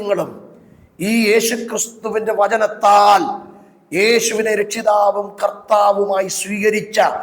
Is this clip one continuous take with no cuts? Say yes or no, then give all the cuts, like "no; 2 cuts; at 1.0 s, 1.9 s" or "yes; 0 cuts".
yes; 0 cuts